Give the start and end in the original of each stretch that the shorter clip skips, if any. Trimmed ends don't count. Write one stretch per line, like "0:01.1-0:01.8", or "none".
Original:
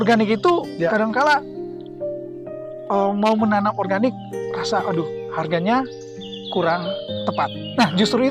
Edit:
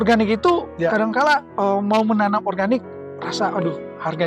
0:01.5-0:02.8